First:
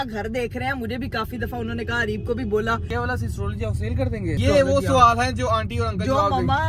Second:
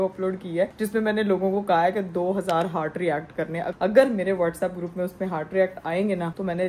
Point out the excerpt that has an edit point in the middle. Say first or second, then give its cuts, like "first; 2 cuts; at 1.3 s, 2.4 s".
first; 2 cuts; at 2.9 s, 4.4 s